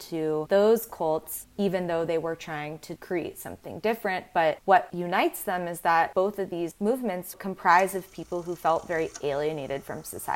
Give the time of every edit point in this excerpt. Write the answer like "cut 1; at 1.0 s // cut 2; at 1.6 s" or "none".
none

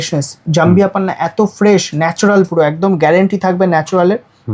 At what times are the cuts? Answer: none

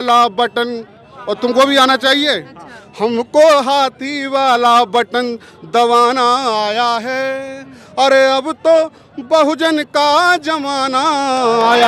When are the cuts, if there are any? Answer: none

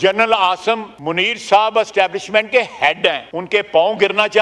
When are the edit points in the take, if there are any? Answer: cut 1; at 0.9 s // cut 2; at 3.3 s

